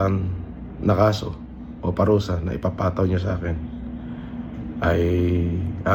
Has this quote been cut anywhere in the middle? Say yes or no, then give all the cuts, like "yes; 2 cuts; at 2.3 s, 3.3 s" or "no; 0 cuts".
no; 0 cuts